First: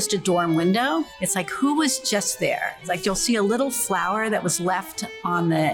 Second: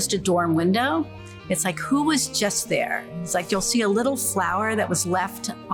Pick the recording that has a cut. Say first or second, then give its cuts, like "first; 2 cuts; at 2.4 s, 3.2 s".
first; 2 cuts; at 1.2 s, 2.7 s